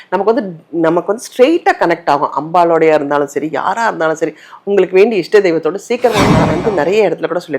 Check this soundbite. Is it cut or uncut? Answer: cut